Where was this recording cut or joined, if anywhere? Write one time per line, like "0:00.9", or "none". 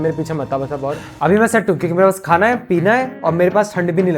0:01.1